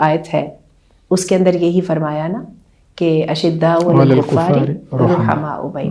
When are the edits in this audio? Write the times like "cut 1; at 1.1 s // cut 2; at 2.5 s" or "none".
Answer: none